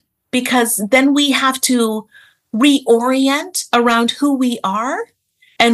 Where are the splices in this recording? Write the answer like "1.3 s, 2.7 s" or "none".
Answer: none